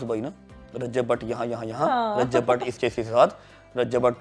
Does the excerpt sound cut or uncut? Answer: uncut